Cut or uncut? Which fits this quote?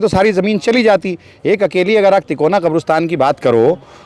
uncut